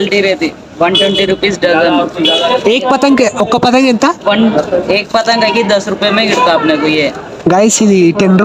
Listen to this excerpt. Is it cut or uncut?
uncut